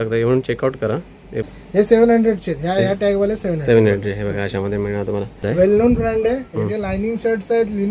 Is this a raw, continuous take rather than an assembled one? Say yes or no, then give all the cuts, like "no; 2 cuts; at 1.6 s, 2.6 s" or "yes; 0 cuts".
no; 2 cuts; at 1.4 s, 5.5 s